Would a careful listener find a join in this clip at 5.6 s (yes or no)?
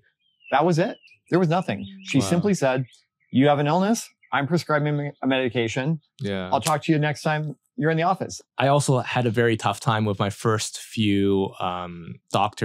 no